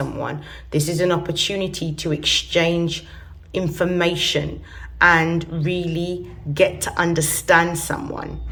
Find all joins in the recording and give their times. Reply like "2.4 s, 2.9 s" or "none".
none